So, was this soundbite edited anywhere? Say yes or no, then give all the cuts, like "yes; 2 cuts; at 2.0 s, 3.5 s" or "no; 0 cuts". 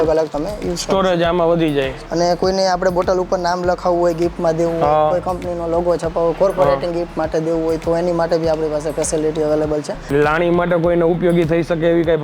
yes; 2 cuts; at 2.0 s, 10.1 s